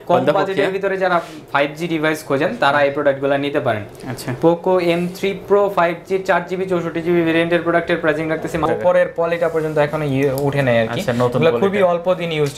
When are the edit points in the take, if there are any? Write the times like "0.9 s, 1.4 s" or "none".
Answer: 8.7 s